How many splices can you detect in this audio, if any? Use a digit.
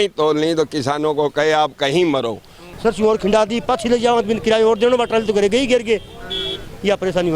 1